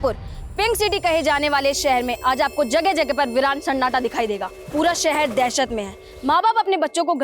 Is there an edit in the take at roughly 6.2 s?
no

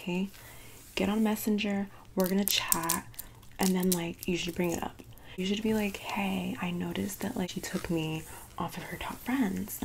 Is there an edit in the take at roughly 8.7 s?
no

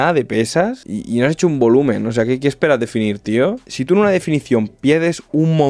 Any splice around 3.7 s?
yes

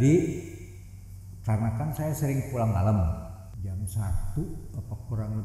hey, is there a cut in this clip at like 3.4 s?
yes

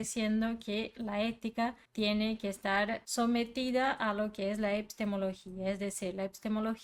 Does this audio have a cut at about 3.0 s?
yes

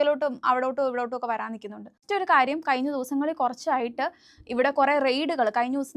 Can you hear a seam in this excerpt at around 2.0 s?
yes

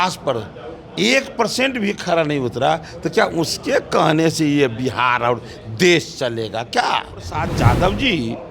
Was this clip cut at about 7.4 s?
yes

